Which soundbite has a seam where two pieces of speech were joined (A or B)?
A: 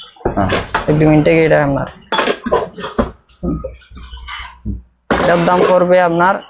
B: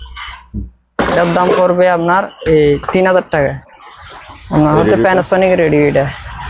B